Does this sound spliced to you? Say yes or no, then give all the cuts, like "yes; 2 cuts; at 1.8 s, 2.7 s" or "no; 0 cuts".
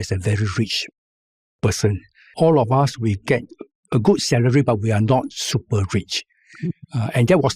yes; 1 cut; at 2.3 s